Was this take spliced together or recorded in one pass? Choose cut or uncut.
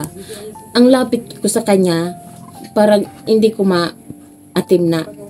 uncut